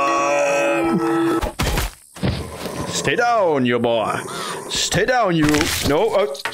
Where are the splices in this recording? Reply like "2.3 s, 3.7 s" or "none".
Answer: 1.4 s